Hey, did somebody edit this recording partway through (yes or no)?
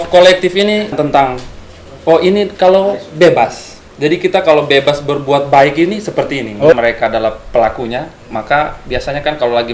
yes